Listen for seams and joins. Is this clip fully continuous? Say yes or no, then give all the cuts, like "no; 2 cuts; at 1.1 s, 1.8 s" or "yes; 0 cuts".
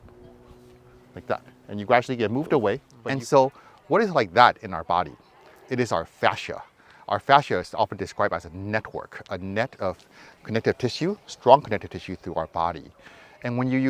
no; 1 cut; at 2.9 s